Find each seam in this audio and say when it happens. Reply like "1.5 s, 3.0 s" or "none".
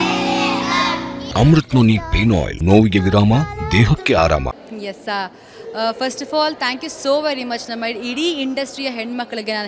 1.2 s, 2.5 s, 4.5 s